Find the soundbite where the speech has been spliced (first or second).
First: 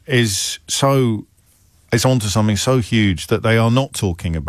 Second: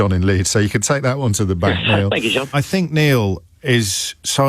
second